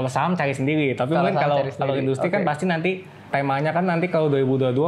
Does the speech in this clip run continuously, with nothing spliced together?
no; 1 cut; at 3.3 s

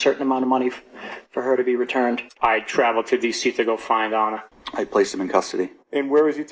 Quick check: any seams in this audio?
yes; 2 cuts; at 2.3 s, 4.5 s

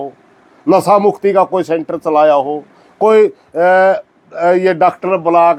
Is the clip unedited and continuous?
yes; 0 cuts

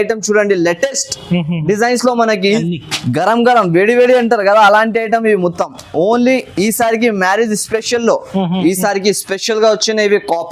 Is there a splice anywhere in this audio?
yes; 2 cuts; at 2.7 s, 8.6 s

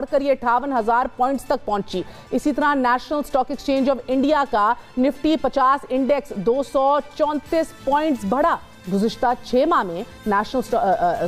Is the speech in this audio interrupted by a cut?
no; 0 cuts

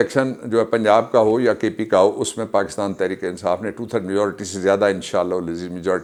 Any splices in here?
no; 0 cuts

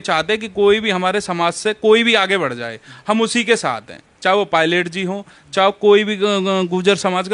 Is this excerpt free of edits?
yes; 0 cuts

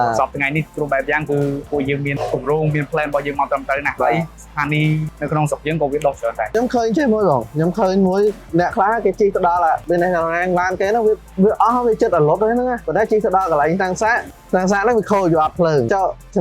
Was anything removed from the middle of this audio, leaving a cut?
yes; 2 cuts; at 2.1 s, 6.5 s

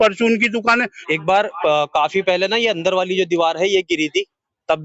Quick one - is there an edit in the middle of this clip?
yes; 1 cut; at 0.9 s

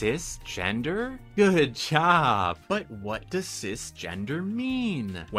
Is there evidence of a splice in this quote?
no; 0 cuts

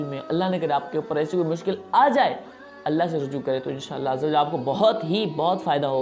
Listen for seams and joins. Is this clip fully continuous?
yes; 0 cuts

